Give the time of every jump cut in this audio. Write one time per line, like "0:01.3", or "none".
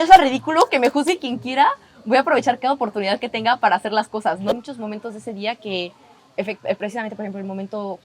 0:04.5